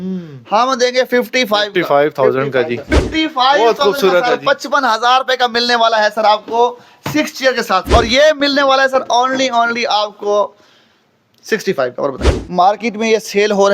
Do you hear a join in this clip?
yes; 3 cuts; at 3.0 s, 7.8 s, 12.2 s

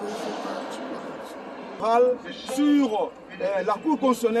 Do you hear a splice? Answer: yes; 1 cut; at 1.8 s

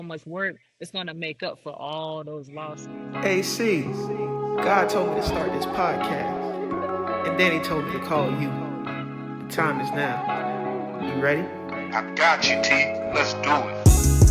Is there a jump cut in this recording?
yes; 1 cut; at 3.0 s

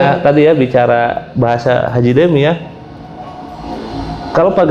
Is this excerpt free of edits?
yes; 0 cuts

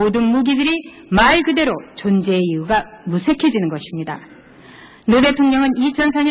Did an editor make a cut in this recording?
yes; 1 cut; at 2.9 s

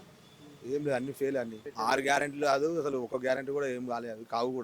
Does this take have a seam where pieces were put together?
yes; 1 cut; at 1.6 s

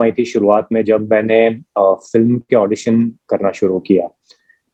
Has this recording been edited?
no; 0 cuts

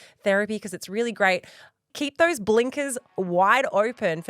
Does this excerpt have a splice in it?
yes; 2 cuts; at 1.9 s, 3.2 s

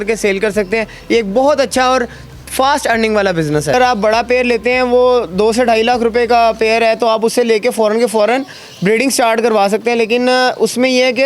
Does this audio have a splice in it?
yes; 1 cut; at 3.7 s

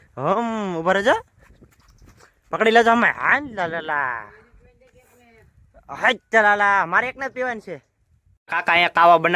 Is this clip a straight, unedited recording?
no; 1 cut; at 8.4 s

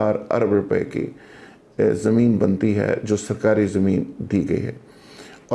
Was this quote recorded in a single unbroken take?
yes; 0 cuts

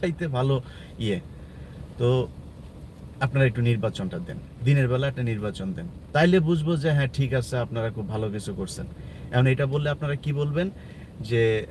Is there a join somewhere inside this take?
no; 0 cuts

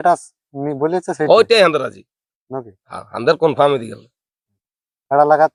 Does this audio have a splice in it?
no; 0 cuts

